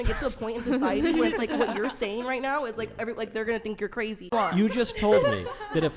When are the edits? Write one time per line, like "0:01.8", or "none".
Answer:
0:04.3